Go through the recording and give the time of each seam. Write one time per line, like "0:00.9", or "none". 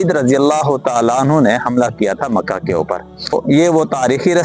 none